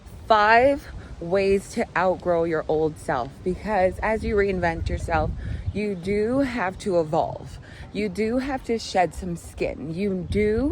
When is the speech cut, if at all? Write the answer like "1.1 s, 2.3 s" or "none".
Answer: none